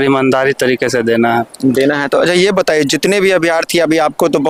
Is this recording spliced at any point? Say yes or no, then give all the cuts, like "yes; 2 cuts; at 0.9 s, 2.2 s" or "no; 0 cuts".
no; 0 cuts